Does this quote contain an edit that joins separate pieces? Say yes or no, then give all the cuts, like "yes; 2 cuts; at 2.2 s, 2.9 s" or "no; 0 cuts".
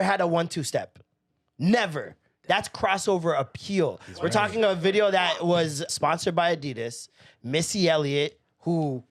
yes; 1 cut; at 5.9 s